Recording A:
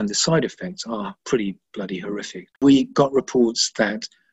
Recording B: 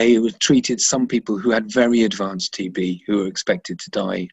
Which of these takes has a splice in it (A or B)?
A